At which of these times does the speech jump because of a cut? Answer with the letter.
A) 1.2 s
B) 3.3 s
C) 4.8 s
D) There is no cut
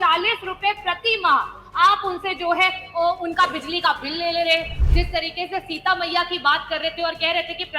C